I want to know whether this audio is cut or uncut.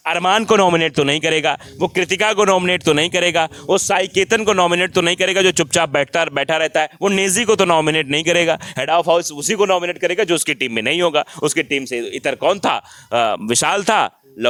uncut